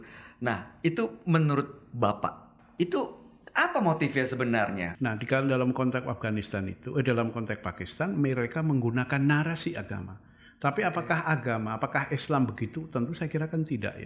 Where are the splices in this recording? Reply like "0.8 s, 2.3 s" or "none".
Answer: 2.5 s, 4.9 s